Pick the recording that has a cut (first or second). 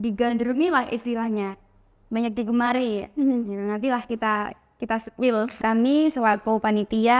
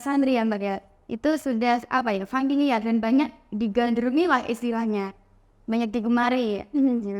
first